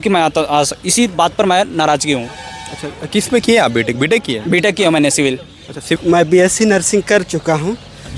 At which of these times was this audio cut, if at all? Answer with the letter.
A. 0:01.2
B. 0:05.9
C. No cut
B